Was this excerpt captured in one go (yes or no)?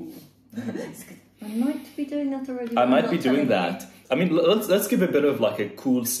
no